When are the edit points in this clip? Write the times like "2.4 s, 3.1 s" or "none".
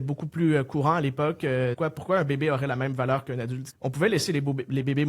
1.8 s, 3.6 s